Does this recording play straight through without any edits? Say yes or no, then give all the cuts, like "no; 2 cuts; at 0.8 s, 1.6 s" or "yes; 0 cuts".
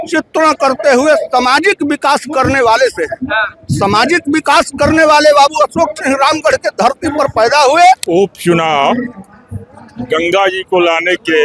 no; 1 cut; at 8.0 s